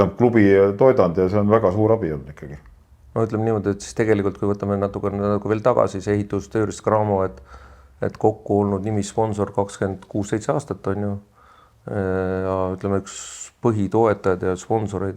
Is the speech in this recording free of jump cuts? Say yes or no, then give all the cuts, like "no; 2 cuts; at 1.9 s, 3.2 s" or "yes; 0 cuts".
yes; 0 cuts